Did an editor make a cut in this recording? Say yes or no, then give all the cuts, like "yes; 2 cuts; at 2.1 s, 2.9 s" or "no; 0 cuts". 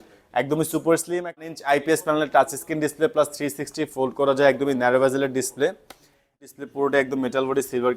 yes; 2 cuts; at 1.4 s, 6.4 s